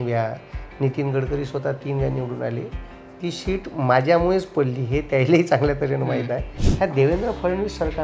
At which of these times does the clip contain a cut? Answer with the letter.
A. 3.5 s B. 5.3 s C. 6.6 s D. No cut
C